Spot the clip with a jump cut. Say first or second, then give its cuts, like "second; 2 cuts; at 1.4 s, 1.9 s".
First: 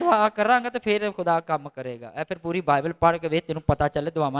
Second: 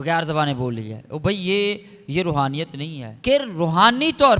second; 1 cut; at 3.1 s